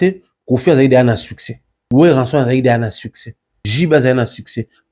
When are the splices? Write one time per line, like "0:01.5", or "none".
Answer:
0:01.7
0:03.6